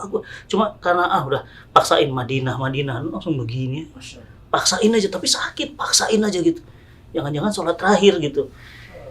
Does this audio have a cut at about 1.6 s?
no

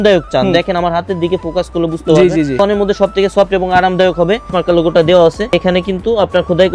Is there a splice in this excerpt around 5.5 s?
yes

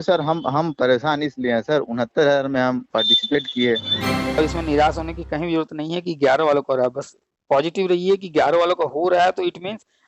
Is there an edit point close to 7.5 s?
no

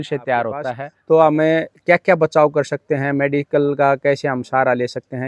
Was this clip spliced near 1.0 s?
yes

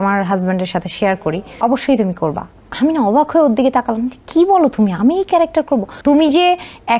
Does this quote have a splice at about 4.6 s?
no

